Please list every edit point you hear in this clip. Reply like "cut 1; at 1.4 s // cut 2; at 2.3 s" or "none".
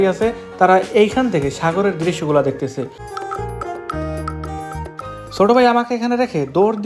cut 1; at 3.0 s